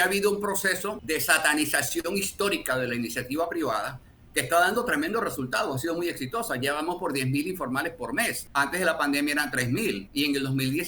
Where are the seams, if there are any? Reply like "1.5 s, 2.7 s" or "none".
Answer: 1.0 s, 8.4 s, 10.0 s